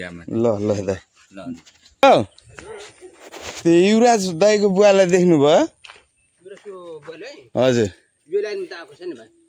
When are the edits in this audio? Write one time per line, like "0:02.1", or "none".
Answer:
0:02.0